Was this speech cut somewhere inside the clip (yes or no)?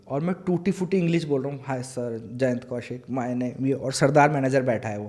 no